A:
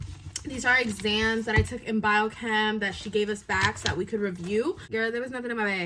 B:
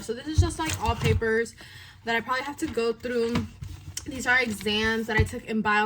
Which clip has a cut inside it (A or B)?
A